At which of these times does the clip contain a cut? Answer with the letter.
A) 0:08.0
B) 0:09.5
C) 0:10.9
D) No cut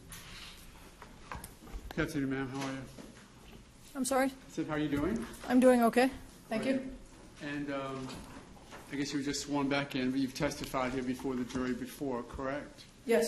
C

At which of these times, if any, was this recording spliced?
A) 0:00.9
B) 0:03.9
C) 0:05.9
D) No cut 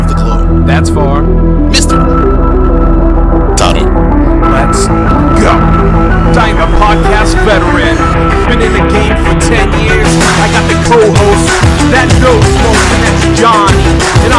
D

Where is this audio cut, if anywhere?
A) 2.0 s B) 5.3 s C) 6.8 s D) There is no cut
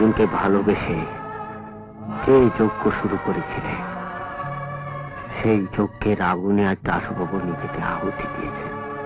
D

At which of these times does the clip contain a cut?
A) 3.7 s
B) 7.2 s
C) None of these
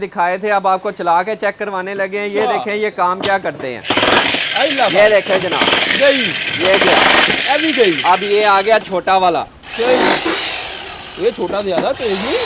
C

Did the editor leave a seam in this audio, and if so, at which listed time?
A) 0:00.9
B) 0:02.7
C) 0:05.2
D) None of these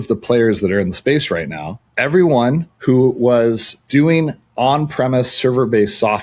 B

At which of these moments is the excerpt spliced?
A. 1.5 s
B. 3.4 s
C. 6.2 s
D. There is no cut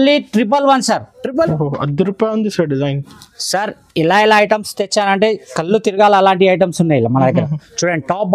A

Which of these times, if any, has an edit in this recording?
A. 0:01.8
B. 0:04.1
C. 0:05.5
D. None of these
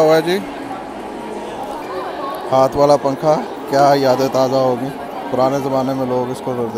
A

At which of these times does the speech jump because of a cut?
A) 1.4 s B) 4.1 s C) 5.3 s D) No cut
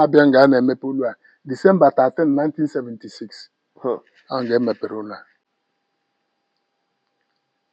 D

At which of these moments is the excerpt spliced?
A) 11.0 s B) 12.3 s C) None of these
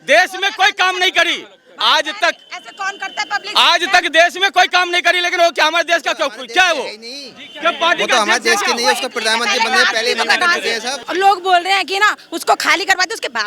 A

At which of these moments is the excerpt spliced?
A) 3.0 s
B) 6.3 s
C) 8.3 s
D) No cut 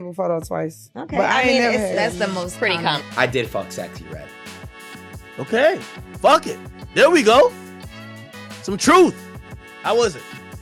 A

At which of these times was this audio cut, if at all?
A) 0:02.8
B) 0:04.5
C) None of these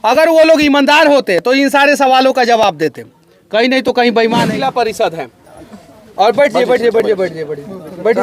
B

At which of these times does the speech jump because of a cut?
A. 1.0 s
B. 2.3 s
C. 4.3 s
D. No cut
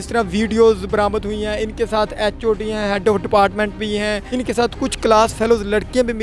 C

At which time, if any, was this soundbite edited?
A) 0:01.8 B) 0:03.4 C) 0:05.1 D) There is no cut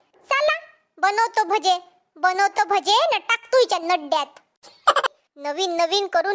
C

